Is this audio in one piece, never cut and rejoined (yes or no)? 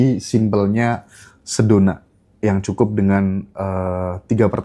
yes